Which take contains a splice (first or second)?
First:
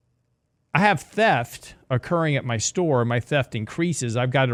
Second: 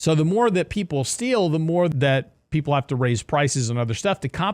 second